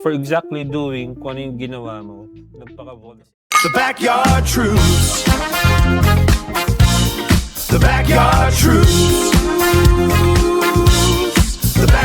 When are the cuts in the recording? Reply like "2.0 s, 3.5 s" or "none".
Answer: 3.3 s